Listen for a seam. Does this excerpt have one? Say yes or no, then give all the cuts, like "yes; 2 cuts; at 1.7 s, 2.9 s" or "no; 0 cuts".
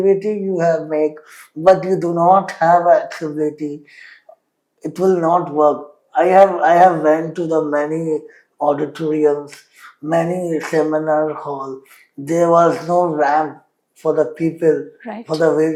no; 0 cuts